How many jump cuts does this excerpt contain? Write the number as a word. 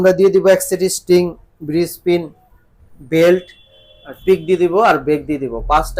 zero